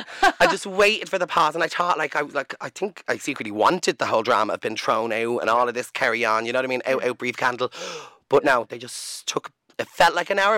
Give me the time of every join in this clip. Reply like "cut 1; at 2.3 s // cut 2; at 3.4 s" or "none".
cut 1; at 9.6 s